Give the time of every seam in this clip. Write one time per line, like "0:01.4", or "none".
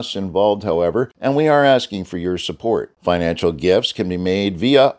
0:01.1
0:02.9